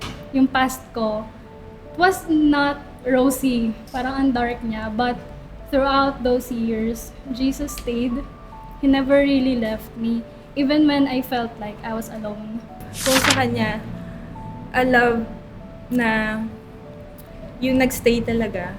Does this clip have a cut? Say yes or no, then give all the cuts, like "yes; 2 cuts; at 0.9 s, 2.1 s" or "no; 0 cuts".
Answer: yes; 1 cut; at 12.8 s